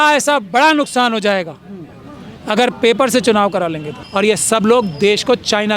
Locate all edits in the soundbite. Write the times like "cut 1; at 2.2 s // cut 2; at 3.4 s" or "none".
cut 1; at 4.0 s

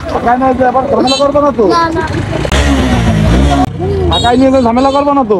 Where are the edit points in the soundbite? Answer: cut 1; at 2.5 s // cut 2; at 3.7 s

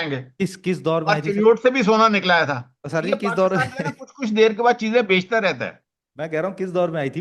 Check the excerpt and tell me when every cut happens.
none

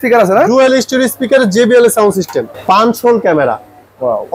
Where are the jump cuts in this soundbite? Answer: cut 1; at 2.5 s

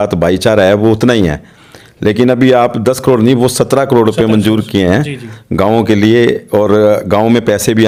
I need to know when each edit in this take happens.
none

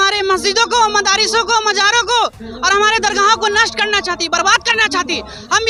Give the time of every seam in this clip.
none

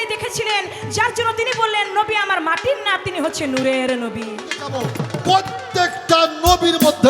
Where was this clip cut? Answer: cut 1; at 5.0 s

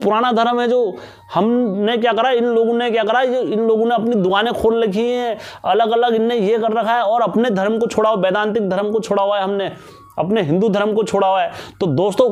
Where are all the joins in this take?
none

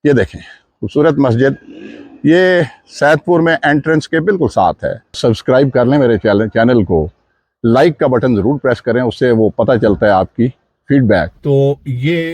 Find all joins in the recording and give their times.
cut 1; at 5.2 s // cut 2; at 11.3 s

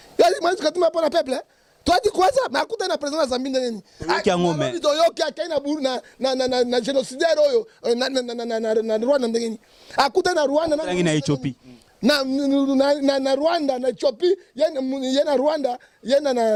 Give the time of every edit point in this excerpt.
none

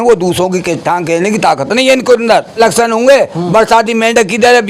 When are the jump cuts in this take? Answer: cut 1; at 2.6 s

